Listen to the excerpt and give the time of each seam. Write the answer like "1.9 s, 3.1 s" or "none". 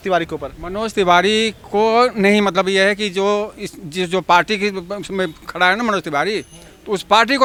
none

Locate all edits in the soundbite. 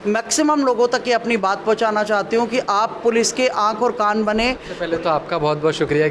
4.7 s

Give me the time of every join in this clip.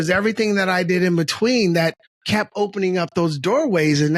2.1 s

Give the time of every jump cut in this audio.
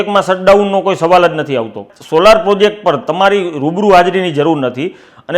1.8 s

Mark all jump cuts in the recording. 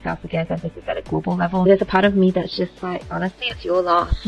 1.7 s

